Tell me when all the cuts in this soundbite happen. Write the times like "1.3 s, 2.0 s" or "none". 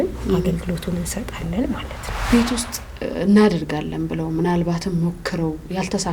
2.3 s

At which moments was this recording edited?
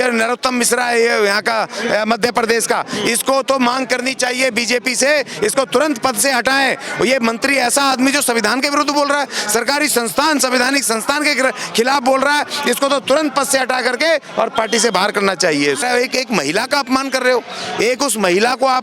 15.8 s

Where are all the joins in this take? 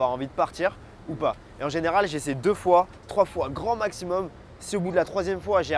none

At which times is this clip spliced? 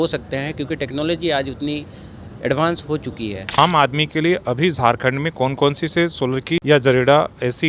3.6 s, 6.6 s

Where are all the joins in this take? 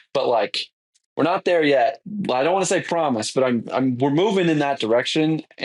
2.1 s

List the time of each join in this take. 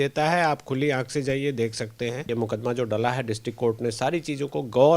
2.3 s

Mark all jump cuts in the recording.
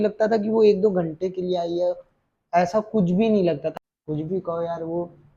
3.7 s

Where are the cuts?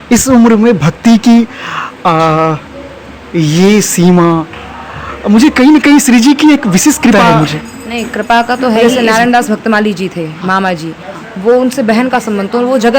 7.1 s, 8.9 s

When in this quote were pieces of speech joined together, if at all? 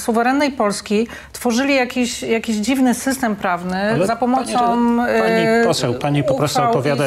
none

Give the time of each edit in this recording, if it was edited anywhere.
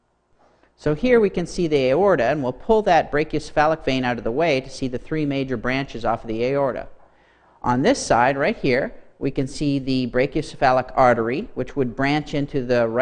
11.4 s

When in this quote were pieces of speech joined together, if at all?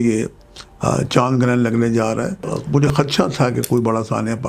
2.5 s

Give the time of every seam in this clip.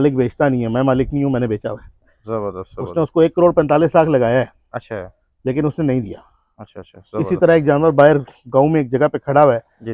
none

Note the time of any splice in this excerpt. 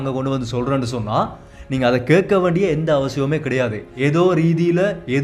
3.8 s

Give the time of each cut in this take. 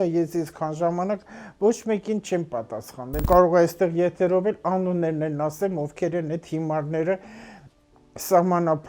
3.2 s

